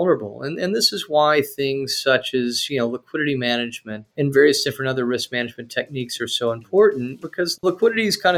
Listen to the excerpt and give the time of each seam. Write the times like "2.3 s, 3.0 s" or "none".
7.2 s